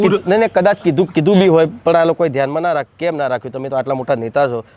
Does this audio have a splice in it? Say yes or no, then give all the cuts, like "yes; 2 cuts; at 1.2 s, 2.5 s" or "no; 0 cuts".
yes; 1 cut; at 2.9 s